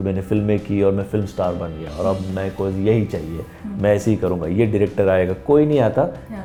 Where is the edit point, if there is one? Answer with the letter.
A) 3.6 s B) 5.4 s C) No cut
C